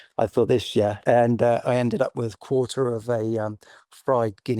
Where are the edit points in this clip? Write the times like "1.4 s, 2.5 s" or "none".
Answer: 1.0 s